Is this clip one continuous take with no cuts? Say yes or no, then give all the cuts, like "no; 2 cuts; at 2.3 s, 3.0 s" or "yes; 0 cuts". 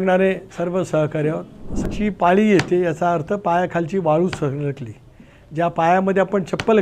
no; 1 cut; at 1.9 s